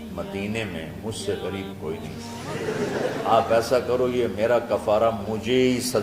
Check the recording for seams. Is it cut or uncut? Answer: uncut